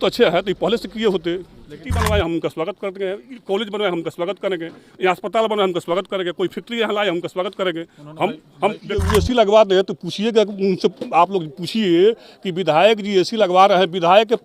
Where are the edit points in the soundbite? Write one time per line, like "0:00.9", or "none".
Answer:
0:01.8
0:09.1